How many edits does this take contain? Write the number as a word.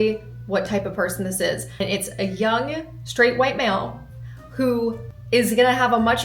three